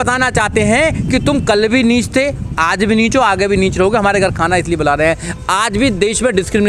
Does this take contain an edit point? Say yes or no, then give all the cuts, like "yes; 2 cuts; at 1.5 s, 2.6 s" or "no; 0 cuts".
no; 0 cuts